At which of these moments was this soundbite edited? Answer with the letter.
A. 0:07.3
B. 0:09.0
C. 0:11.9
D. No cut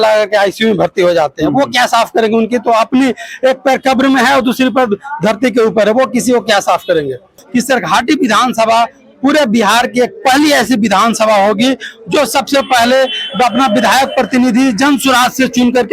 A